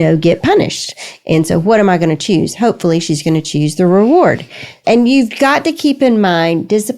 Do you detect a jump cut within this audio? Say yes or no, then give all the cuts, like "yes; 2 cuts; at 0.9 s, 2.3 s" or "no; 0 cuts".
no; 0 cuts